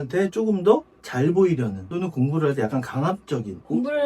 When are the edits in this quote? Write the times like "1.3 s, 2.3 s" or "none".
1.0 s